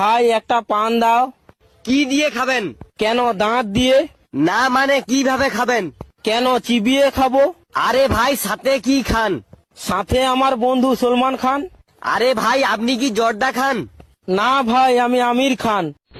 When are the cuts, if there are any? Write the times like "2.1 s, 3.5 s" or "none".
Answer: none